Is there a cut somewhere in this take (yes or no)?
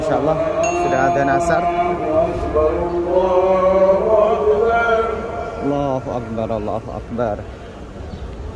no